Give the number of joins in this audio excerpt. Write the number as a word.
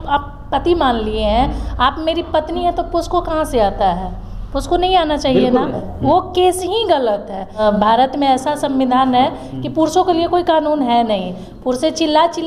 two